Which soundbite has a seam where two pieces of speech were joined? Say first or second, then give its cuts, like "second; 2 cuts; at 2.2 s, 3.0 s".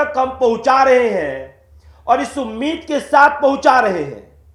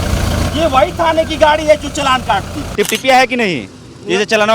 second; 1 cut; at 2.6 s